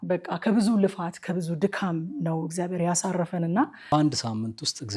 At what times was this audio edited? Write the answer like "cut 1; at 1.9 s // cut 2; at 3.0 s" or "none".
cut 1; at 3.9 s